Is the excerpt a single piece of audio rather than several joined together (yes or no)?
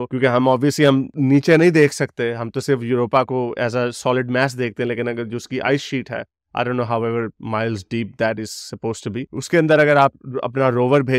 yes